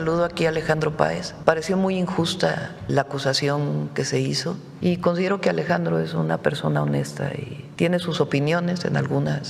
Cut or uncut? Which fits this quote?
cut